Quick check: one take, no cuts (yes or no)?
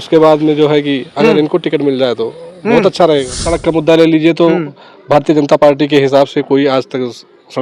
no